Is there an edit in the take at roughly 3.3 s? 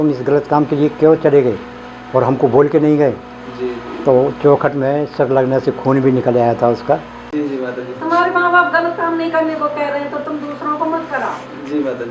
no; 1 cut; at 7.2 s

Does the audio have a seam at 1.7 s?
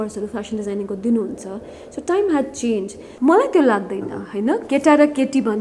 no; 1 cut; at 3.0 s

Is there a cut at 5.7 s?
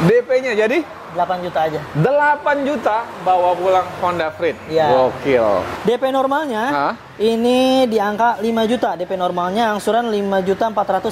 yes; 1 cut; at 5.7 s

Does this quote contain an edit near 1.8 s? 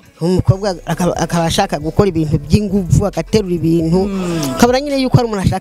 no; 0 cuts

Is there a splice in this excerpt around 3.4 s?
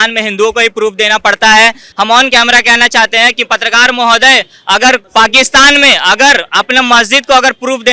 no; 2 cuts; at 1.8 s, 5.1 s

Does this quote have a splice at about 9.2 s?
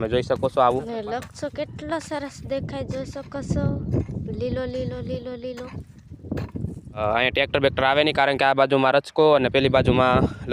no; 2 cuts; at 0.9 s, 7.0 s

